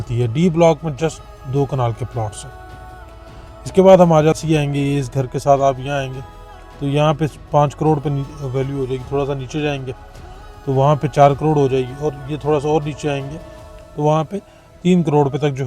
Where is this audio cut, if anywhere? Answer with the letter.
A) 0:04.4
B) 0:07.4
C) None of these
A